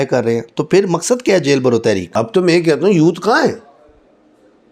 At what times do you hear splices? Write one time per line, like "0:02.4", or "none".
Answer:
0:02.1